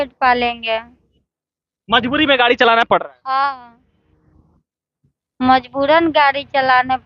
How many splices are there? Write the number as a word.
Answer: zero